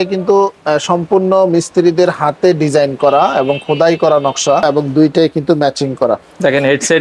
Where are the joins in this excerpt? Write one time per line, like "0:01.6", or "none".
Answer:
0:04.8